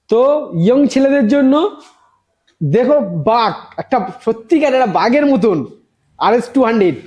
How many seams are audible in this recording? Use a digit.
0